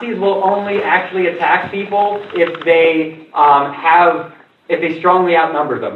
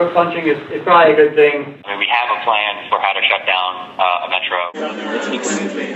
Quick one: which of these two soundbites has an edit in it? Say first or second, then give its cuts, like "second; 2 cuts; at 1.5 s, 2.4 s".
second; 2 cuts; at 1.8 s, 4.7 s